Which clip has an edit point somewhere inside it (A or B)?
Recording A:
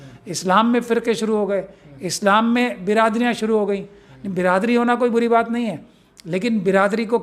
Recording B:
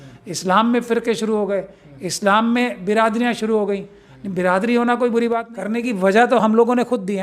B